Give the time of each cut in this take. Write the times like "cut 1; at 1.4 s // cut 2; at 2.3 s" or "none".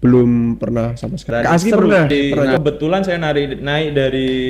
cut 1; at 1.3 s // cut 2; at 2.3 s